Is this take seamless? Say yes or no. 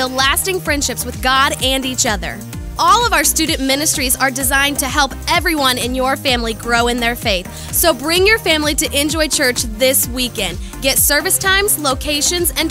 yes